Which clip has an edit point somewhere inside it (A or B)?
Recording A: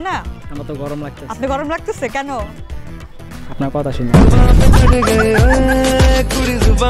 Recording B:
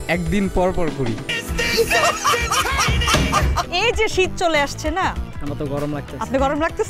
B